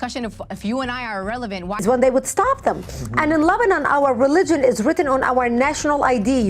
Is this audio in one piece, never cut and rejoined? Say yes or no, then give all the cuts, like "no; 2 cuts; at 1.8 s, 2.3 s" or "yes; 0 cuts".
no; 1 cut; at 1.8 s